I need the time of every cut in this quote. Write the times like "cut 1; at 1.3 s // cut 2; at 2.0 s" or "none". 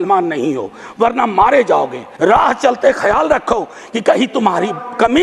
cut 1; at 2.0 s